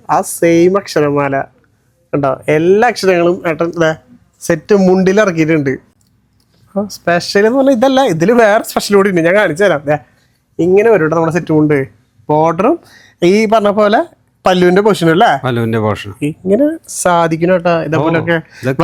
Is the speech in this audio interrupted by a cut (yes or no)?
no